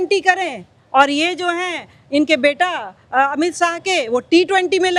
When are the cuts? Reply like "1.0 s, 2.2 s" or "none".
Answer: none